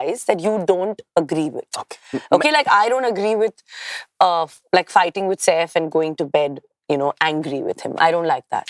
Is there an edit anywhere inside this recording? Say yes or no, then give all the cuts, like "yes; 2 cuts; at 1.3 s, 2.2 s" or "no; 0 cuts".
no; 0 cuts